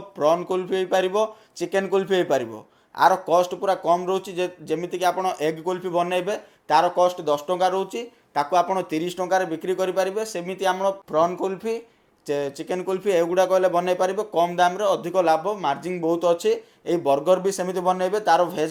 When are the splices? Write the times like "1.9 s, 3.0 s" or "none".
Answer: none